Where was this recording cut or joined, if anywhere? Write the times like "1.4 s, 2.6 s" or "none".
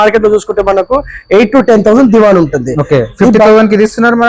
none